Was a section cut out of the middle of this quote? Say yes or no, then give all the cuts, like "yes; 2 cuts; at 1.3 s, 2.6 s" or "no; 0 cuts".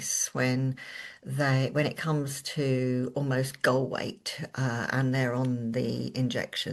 no; 0 cuts